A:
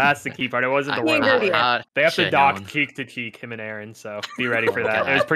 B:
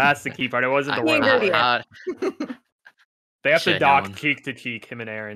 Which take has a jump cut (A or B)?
A